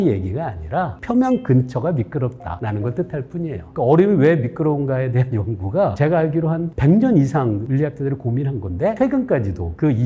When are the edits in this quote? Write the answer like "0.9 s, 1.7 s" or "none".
1.0 s, 2.5 s, 3.6 s, 5.9 s, 7.6 s, 9.0 s